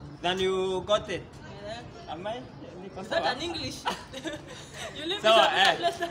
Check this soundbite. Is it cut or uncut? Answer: uncut